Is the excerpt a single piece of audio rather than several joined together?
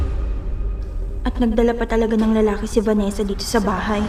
yes; 0 cuts

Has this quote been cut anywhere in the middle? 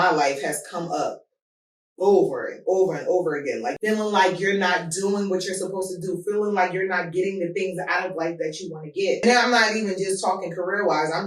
yes; 2 cuts; at 3.7 s, 9.2 s

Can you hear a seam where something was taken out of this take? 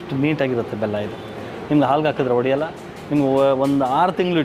no; 0 cuts

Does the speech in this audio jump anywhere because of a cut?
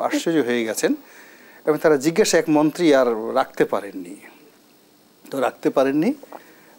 no; 0 cuts

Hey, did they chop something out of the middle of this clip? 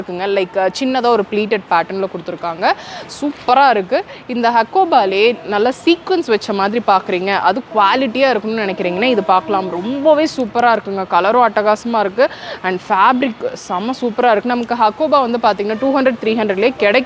no; 0 cuts

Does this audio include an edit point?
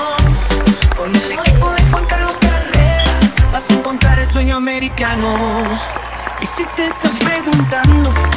yes; 1 cut; at 6.4 s

